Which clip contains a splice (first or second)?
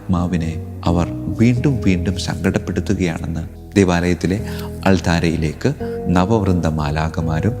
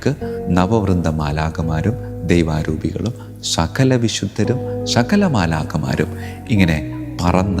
first